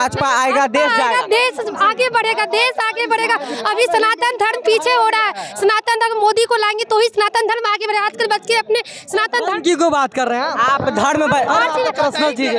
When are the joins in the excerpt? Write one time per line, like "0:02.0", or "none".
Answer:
none